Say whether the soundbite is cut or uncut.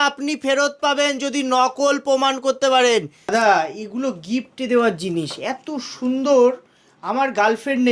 cut